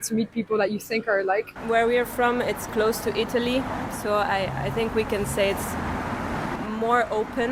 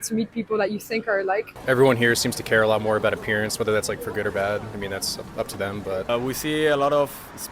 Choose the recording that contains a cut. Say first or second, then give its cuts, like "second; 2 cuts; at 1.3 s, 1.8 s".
second; 2 cuts; at 1.5 s, 6.0 s